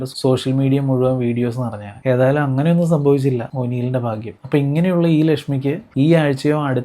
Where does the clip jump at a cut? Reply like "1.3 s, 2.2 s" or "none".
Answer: 4.3 s